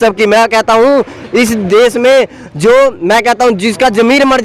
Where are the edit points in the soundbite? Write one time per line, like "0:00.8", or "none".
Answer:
none